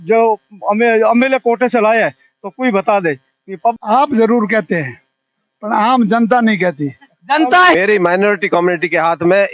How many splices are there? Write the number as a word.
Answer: two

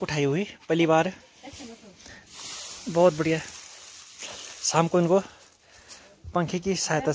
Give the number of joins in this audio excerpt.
zero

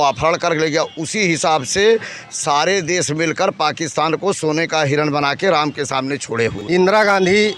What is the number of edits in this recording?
one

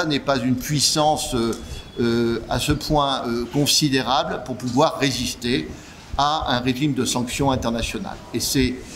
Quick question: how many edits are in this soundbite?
zero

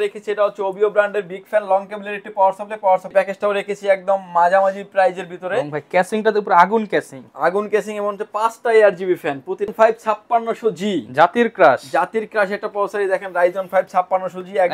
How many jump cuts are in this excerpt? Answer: two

